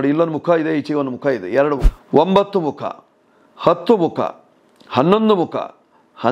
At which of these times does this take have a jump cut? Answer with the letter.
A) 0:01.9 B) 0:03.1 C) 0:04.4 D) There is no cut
A